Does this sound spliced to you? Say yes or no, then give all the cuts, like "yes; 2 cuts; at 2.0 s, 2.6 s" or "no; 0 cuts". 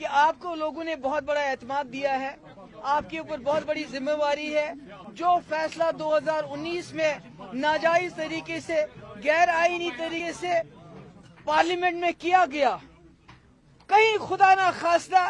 yes; 2 cuts; at 5.1 s, 10.2 s